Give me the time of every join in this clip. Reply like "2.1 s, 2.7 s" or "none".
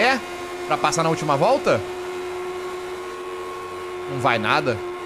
none